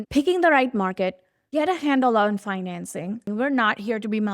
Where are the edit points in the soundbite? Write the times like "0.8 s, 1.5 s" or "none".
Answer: 3.3 s